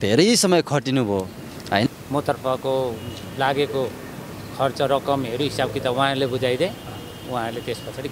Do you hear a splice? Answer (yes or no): yes